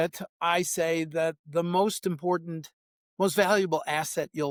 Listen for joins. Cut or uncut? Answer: uncut